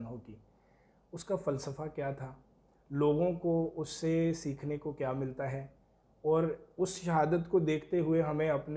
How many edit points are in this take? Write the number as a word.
zero